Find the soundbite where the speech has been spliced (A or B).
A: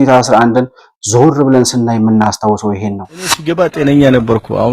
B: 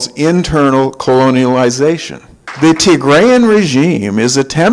A